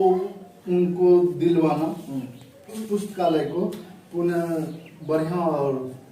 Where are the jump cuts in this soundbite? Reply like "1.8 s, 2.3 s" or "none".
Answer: 2.7 s

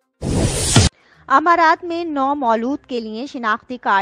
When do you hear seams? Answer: 1.0 s

